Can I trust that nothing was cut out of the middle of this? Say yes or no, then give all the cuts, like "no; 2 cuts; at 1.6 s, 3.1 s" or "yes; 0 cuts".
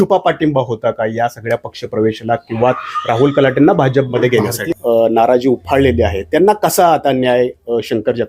no; 1 cut; at 4.7 s